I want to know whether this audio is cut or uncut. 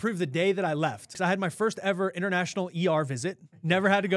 cut